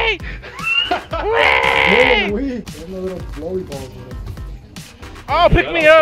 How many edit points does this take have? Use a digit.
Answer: 1